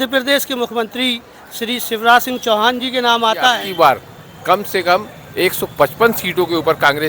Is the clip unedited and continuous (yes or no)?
no